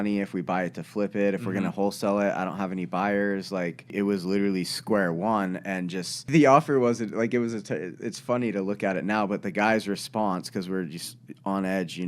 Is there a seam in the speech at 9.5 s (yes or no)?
no